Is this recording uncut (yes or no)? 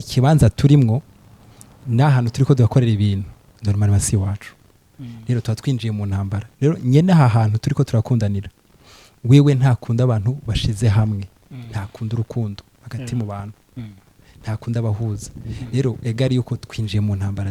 yes